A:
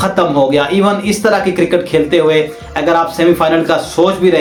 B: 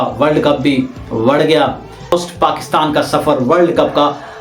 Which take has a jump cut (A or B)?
B